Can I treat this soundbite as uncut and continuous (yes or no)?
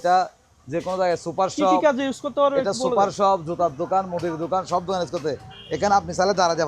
yes